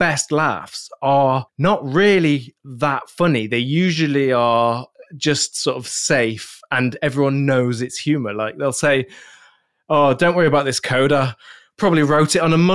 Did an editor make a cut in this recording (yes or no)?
yes